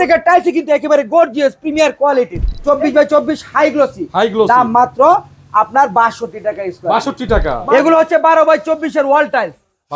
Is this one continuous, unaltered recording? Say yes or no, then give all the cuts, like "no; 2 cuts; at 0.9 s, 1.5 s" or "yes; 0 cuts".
no; 2 cuts; at 2.3 s, 7.5 s